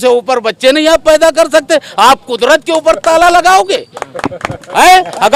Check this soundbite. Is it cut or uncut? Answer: uncut